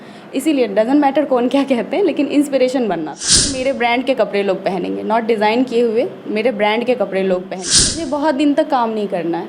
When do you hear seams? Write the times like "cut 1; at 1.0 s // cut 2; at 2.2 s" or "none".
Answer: cut 1; at 3.5 s // cut 2; at 8.0 s